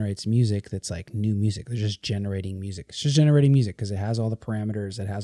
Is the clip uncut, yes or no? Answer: yes